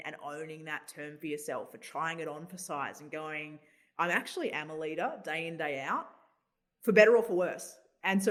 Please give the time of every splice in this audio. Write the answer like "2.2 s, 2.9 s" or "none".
none